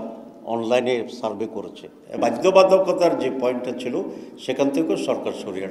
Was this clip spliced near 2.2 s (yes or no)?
yes